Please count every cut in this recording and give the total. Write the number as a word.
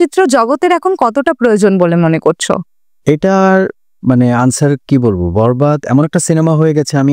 zero